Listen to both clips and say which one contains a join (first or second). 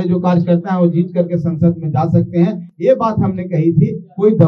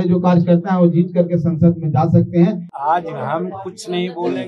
second